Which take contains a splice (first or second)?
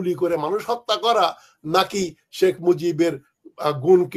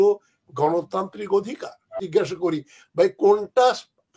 second